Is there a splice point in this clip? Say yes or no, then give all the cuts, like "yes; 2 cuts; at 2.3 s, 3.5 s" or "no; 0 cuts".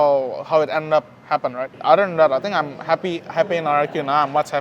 yes; 1 cut; at 1.7 s